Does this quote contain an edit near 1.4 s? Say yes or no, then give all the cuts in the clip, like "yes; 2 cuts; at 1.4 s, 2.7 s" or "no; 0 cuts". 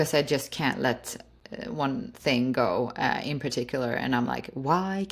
no; 0 cuts